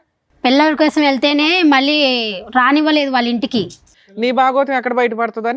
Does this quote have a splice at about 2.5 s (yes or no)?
no